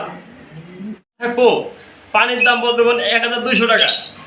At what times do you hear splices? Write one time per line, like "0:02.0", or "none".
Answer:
0:01.2